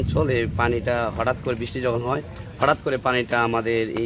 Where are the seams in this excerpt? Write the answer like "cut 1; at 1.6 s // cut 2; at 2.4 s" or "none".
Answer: none

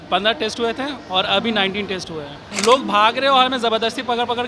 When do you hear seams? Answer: cut 1; at 2.5 s

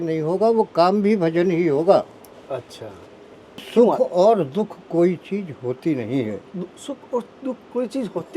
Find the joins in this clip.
cut 1; at 3.7 s

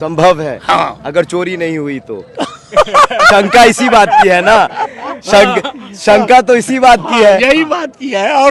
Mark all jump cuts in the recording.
none

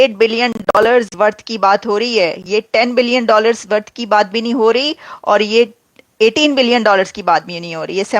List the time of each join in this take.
none

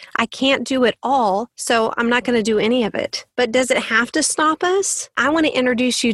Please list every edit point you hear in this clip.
cut 1; at 1.5 s // cut 2; at 3.2 s // cut 3; at 5.2 s

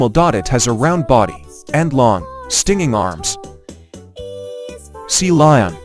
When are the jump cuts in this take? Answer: cut 1; at 3.8 s // cut 2; at 5.1 s

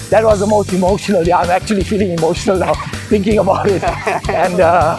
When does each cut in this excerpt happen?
none

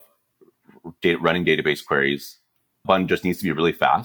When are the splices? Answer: cut 1; at 2.8 s

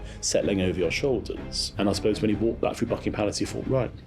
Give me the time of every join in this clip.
cut 1; at 1.6 s

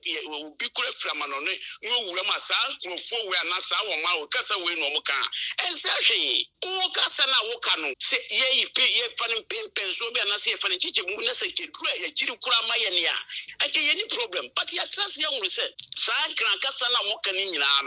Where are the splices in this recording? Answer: cut 1; at 6.5 s // cut 2; at 8.0 s // cut 3; at 15.9 s

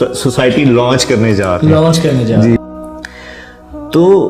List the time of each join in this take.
cut 1; at 2.6 s

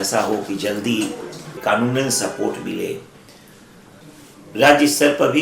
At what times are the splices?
cut 1; at 1.6 s // cut 2; at 3.9 s

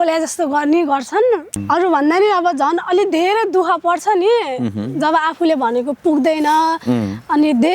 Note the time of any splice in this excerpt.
cut 1; at 1.6 s

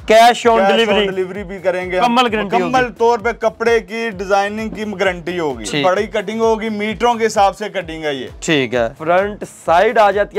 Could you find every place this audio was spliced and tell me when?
cut 1; at 2.0 s // cut 2; at 5.8 s // cut 3; at 9.0 s

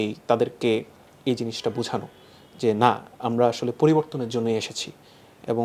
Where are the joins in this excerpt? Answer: none

